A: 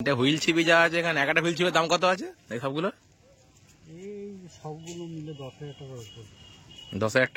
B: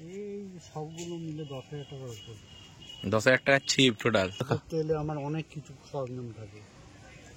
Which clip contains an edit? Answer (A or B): B